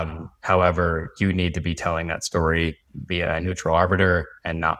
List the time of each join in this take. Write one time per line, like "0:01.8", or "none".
0:02.9

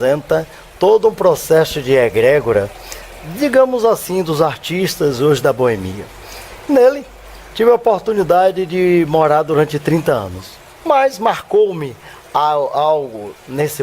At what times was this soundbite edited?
0:10.1

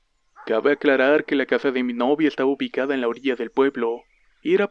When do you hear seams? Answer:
0:03.6

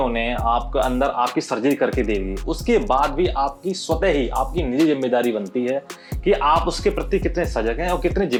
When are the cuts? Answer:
none

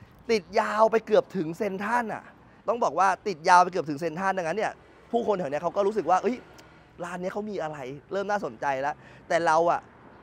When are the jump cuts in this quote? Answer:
0:02.4

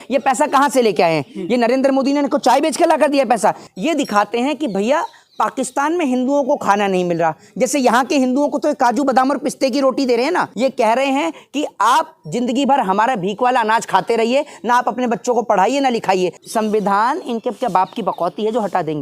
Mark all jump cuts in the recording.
0:03.7
0:10.5
0:16.4

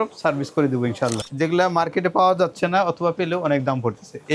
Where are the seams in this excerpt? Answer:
0:01.2

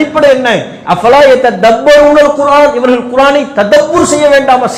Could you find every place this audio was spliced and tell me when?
none

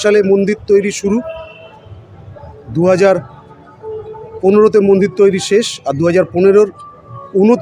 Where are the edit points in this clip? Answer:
none

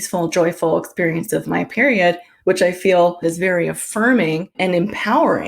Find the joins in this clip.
0:02.3
0:03.2
0:04.5

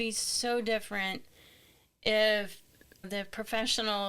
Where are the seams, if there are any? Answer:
0:03.1

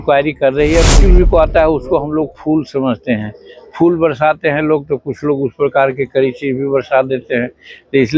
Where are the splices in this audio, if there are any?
0:01.0

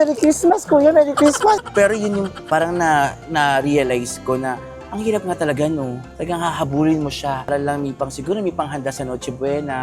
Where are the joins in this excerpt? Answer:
0:01.6

